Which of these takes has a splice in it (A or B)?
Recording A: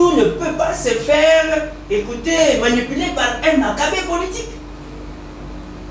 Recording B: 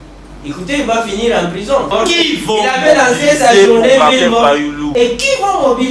B